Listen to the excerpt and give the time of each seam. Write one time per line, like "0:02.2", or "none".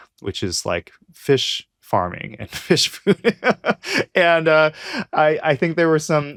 none